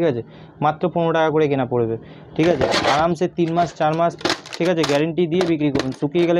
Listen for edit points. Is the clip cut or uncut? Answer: uncut